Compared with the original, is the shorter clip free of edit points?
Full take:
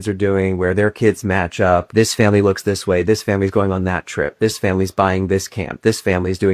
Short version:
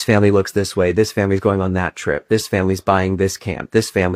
yes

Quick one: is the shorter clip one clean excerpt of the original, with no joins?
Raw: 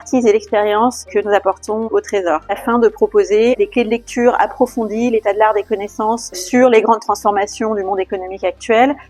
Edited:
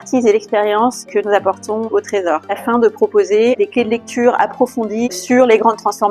no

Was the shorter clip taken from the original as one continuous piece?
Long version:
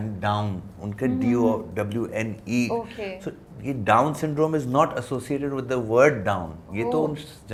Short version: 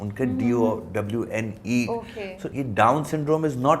no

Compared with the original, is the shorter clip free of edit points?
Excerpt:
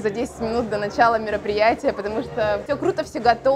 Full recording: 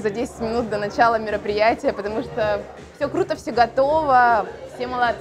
no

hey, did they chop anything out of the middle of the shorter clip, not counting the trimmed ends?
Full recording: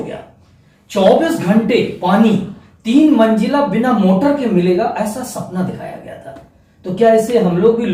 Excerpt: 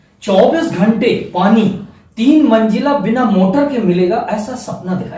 no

